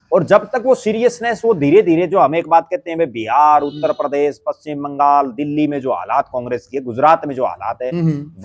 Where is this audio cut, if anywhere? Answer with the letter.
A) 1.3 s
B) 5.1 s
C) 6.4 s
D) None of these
D